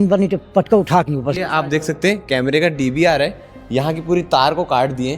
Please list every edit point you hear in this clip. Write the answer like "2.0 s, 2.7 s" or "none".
1.4 s